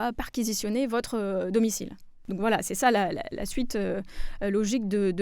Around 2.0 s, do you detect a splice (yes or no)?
no